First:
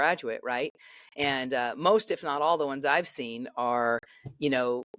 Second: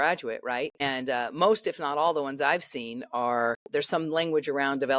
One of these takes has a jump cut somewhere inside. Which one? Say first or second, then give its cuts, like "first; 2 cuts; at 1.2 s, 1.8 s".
second; 2 cuts; at 0.8 s, 3.6 s